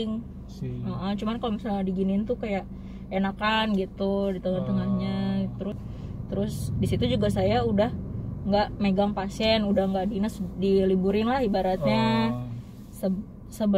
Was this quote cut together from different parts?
yes; 1 cut; at 5.9 s

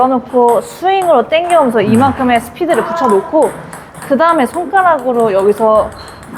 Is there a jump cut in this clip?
no; 0 cuts

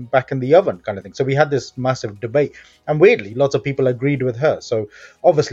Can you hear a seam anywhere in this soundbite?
no; 0 cuts

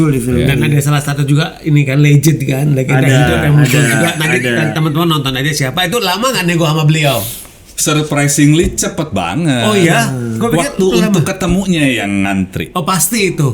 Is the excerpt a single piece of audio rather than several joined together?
yes; 0 cuts

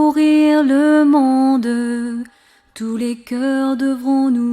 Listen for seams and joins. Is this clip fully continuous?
yes; 0 cuts

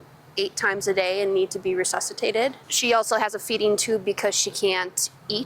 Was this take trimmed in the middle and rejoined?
yes; 1 cut; at 2.7 s

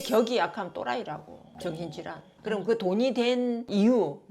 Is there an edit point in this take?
yes; 1 cut; at 2.3 s

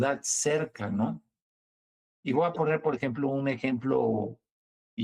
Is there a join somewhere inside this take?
no; 0 cuts

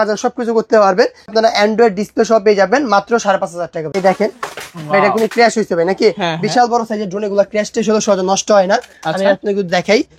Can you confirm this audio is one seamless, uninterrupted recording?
no; 2 cuts; at 1.3 s, 3.8 s

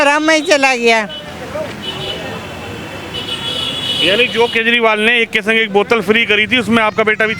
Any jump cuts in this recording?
no; 0 cuts

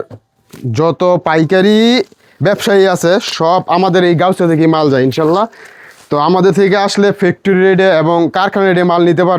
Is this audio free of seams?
yes; 0 cuts

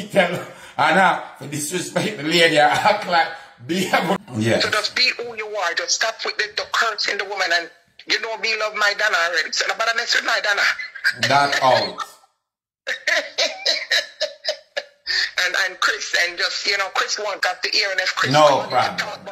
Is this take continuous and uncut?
no; 2 cuts; at 4.2 s, 17.4 s

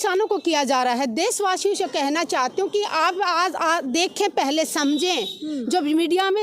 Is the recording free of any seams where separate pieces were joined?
yes; 0 cuts

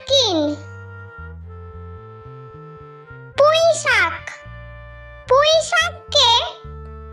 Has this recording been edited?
no; 0 cuts

